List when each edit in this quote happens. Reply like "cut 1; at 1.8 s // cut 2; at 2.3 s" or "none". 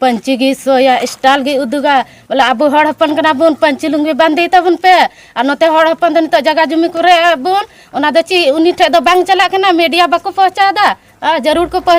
none